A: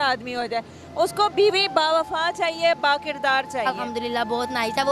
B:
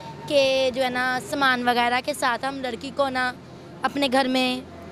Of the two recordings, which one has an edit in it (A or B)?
A